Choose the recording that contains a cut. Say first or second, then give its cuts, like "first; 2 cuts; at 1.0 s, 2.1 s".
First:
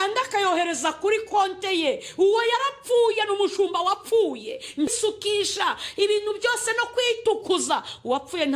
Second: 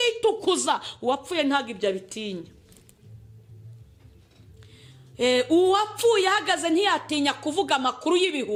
first; 1 cut; at 4.9 s